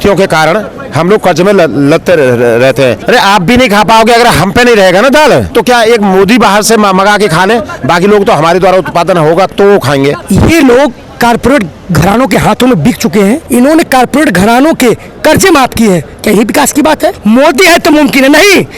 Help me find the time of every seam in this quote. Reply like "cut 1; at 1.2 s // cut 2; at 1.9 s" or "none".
cut 1; at 3.0 s // cut 2; at 5.5 s // cut 3; at 10.2 s // cut 4; at 13.4 s // cut 5; at 17.2 s